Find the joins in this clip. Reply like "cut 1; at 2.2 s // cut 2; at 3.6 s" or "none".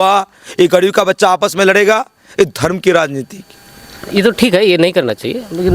none